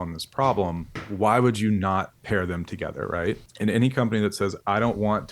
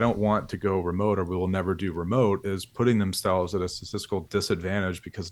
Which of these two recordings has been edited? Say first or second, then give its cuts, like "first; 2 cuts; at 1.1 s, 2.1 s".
first; 3 cuts; at 1.0 s, 2.2 s, 3.5 s